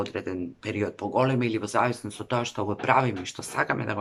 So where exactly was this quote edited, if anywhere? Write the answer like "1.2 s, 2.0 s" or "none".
none